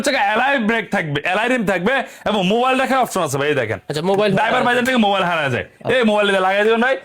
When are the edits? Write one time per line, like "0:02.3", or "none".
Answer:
none